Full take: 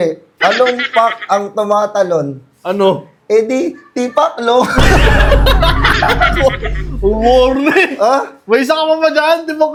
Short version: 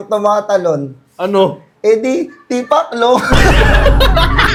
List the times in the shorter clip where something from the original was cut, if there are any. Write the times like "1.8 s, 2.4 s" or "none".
none